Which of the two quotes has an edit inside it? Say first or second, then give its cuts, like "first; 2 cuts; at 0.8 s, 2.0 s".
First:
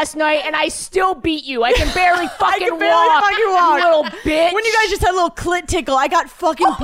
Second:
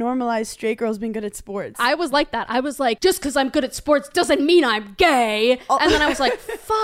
second; 2 cuts; at 1.8 s, 3.0 s